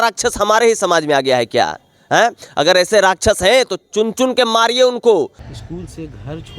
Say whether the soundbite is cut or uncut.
cut